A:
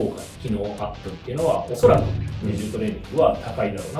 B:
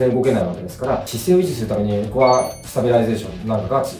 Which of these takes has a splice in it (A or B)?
B